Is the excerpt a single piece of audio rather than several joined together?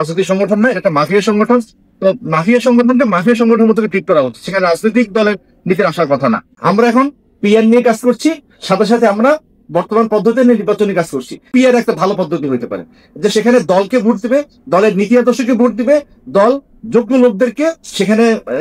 no; 2 cuts; at 6.5 s, 11.4 s

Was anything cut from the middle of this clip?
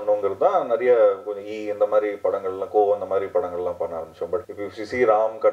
yes; 1 cut; at 4.5 s

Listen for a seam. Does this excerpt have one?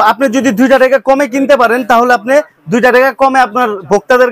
no; 0 cuts

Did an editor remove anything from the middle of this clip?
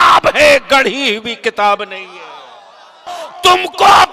yes; 1 cut; at 3.2 s

